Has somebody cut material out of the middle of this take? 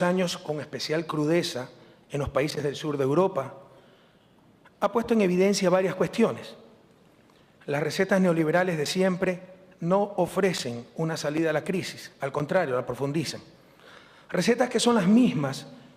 no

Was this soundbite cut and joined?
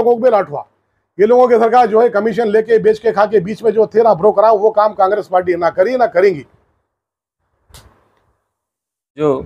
no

